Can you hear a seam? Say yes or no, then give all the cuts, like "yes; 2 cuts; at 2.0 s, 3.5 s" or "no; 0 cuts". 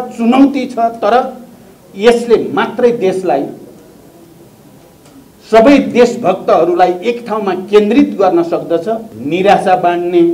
yes; 1 cut; at 9.1 s